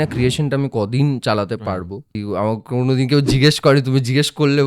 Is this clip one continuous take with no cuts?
no; 1 cut; at 2.1 s

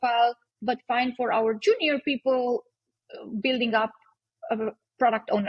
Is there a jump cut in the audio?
no; 0 cuts

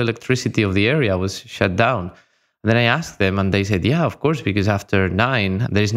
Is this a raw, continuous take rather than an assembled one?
yes; 0 cuts

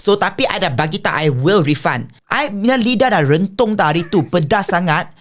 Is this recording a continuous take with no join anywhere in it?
no; 1 cut; at 2.1 s

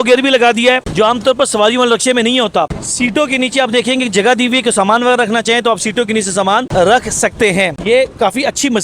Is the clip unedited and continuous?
no; 2 cuts; at 2.7 s, 7.8 s

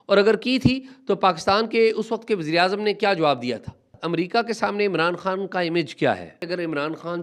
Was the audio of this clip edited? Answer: yes; 2 cuts; at 4.0 s, 6.4 s

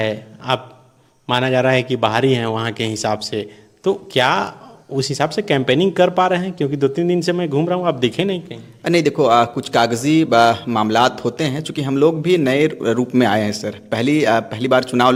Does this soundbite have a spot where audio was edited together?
no; 0 cuts

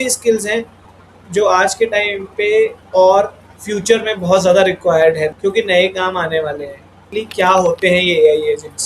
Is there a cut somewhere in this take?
yes; 3 cuts; at 2.8 s, 5.3 s, 7.0 s

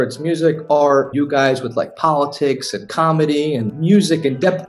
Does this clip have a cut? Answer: yes; 2 cuts; at 1.1 s, 3.7 s

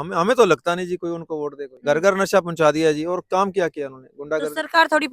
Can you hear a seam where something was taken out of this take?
yes; 1 cut; at 1.7 s

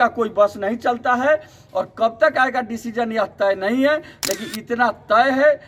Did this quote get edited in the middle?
no; 0 cuts

